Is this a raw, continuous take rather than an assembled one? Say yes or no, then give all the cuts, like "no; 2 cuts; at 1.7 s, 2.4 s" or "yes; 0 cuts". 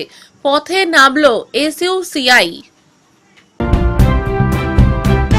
no; 1 cut; at 3.6 s